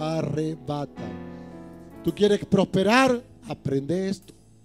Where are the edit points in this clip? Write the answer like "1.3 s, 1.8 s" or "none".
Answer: none